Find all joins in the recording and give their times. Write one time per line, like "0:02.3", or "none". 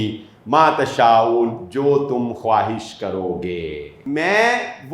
0:03.9